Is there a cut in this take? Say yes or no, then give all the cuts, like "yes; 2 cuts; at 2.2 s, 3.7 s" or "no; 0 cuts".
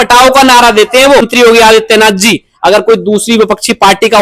yes; 1 cut; at 1.3 s